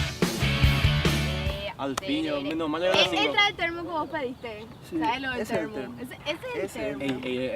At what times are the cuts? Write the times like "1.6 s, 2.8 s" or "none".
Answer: 2.4 s